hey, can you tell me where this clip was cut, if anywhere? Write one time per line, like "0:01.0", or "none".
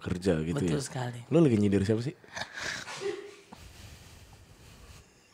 none